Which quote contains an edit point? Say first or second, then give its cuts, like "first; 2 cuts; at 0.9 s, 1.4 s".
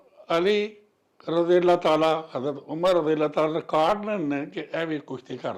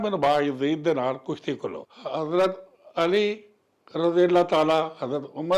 second; 1 cut; at 1.7 s